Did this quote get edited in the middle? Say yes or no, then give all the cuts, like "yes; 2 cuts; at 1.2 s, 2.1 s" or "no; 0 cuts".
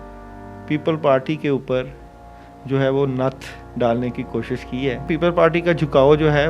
yes; 1 cut; at 5.1 s